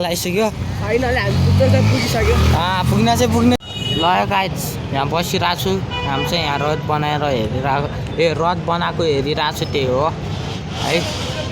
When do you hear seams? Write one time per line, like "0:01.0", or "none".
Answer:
0:03.6